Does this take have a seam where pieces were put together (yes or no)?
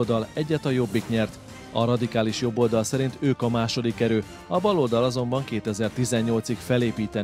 no